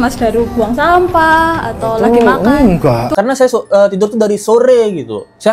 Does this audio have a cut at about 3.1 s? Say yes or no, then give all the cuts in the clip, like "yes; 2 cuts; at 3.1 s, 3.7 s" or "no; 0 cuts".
yes; 1 cut; at 3.1 s